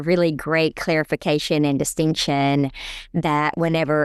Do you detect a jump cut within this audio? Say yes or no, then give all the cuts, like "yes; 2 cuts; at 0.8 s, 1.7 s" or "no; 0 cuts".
no; 0 cuts